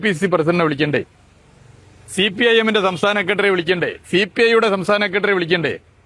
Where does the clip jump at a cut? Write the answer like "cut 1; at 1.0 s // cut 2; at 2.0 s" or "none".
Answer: none